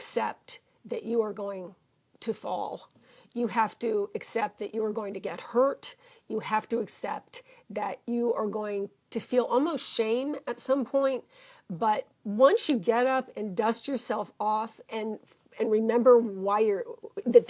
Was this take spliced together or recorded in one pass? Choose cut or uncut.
uncut